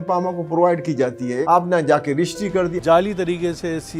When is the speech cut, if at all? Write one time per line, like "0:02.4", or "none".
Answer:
0:01.4
0:02.8